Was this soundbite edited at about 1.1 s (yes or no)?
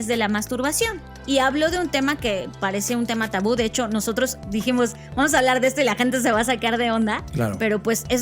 yes